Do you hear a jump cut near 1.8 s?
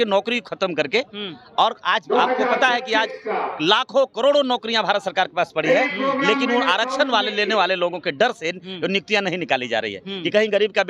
no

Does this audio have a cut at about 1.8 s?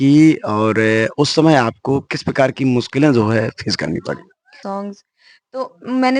no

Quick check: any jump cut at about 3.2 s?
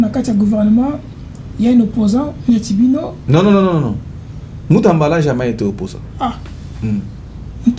no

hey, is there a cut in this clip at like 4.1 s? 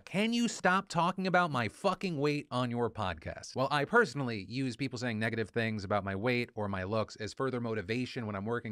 yes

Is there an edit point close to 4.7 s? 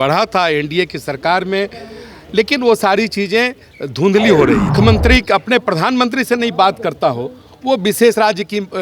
yes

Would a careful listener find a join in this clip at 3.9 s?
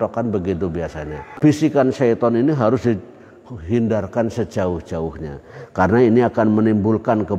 no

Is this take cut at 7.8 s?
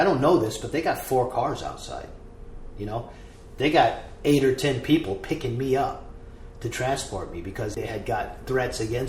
yes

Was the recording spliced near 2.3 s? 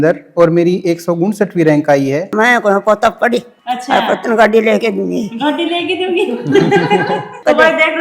yes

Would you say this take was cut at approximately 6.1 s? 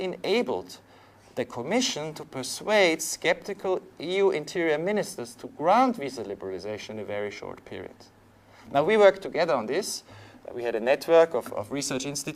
yes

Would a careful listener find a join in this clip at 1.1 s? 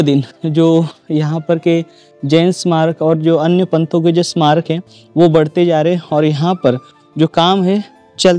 no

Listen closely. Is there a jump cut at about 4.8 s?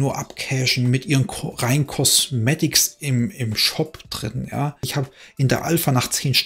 yes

